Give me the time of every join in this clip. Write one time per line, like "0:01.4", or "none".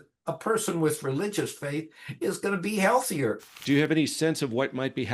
0:03.5

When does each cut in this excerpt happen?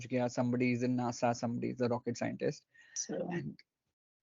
0:03.2

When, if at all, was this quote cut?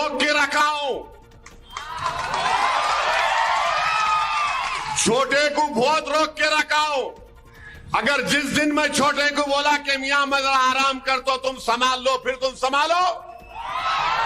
0:11.2

